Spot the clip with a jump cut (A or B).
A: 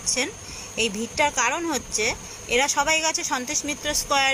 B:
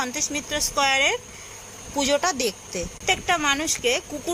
B